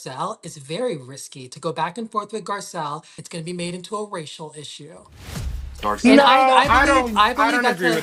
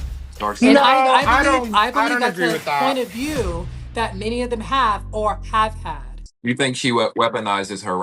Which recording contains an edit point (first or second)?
second